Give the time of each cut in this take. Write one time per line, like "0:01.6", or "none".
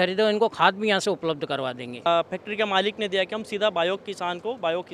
0:02.1